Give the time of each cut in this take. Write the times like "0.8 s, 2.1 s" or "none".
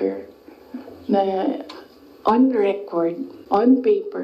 3.3 s